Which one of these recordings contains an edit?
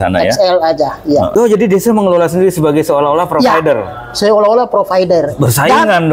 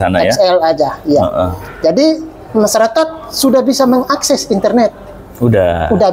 first; 1 cut; at 1.3 s

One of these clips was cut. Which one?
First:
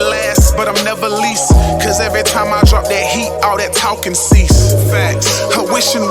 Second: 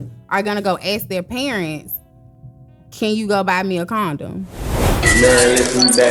second; 1 cut; at 4.9 s

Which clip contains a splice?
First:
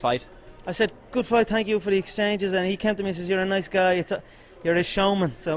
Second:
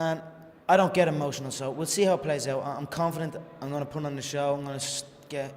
second; 1 cut; at 3.8 s

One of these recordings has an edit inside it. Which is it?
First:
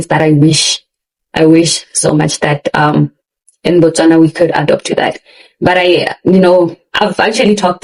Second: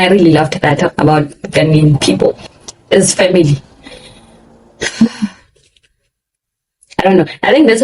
second; 1 cut; at 0.9 s

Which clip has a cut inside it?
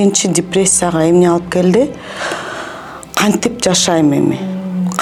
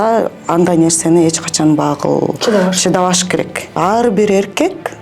second; 1 cut; at 3.7 s

